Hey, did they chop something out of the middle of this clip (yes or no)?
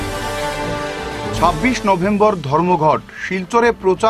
no